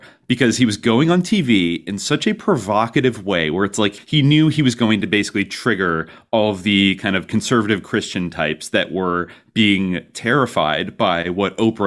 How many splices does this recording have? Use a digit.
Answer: 1